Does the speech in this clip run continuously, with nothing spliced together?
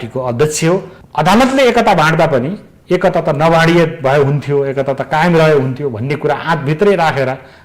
no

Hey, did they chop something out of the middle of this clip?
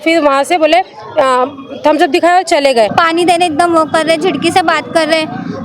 yes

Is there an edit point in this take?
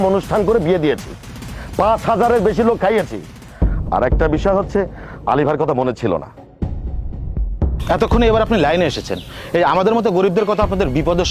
no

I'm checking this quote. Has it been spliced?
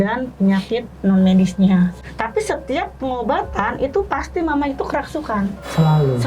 yes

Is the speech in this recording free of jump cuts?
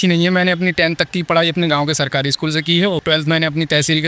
no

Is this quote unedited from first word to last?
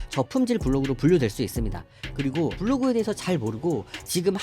no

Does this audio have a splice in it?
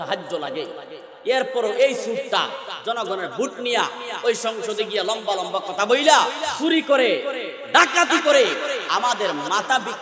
yes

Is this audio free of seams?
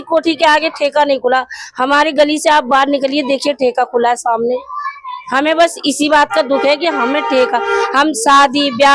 yes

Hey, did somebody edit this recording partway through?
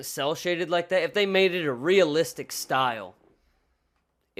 no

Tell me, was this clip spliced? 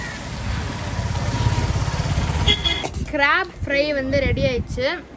yes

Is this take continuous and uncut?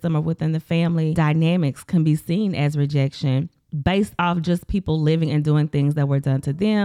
no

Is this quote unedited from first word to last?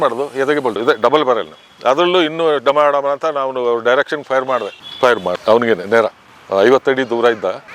no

